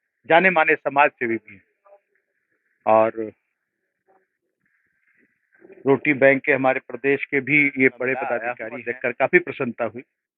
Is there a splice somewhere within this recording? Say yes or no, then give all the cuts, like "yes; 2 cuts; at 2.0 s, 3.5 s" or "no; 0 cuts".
yes; 1 cut; at 8.6 s